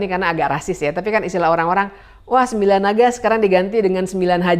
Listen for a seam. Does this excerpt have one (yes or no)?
no